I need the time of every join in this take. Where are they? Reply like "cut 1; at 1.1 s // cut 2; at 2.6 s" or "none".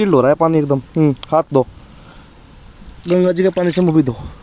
cut 1; at 3.0 s